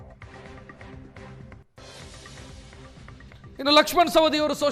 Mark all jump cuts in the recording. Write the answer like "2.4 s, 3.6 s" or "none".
1.5 s

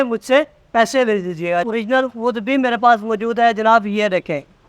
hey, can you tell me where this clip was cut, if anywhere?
1.6 s

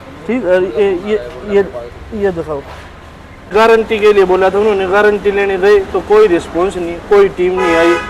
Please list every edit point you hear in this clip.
3.5 s

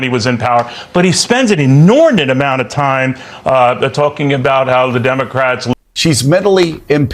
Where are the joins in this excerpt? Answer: 5.7 s

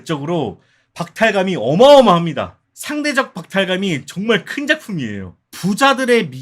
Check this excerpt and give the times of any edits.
5.4 s

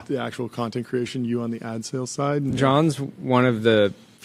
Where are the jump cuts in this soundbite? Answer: 2.5 s

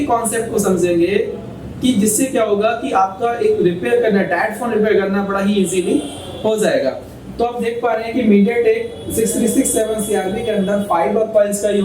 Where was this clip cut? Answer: none

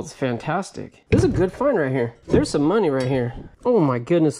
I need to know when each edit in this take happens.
0.9 s, 2.1 s, 3.4 s

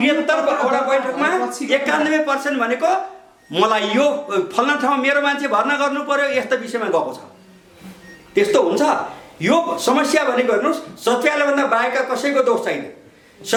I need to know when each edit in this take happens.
none

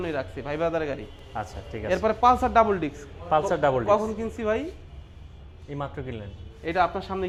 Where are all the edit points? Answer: none

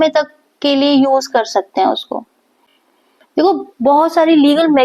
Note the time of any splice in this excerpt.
none

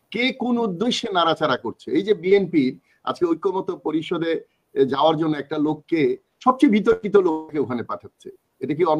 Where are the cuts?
none

